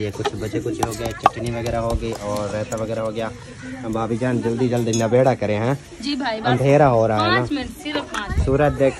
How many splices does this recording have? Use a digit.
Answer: 0